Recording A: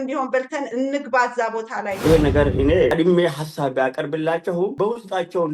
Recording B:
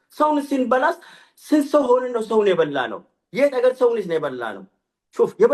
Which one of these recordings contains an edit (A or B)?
A